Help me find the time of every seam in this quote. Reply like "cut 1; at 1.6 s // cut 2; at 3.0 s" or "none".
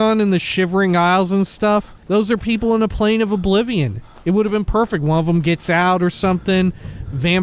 cut 1; at 2.0 s

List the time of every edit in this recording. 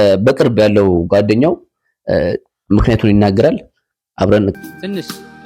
cut 1; at 4.6 s

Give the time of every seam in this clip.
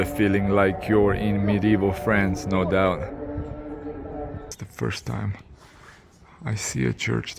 cut 1; at 4.6 s

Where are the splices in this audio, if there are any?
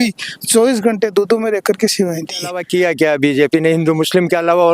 cut 1; at 2.6 s

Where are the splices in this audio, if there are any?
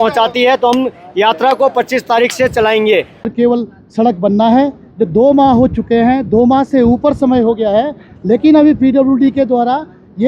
cut 1; at 3.3 s

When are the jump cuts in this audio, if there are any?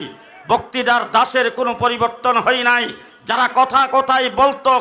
none

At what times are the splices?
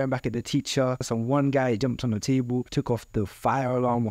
cut 1; at 1.0 s // cut 2; at 2.2 s

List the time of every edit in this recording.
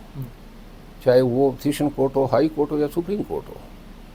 none

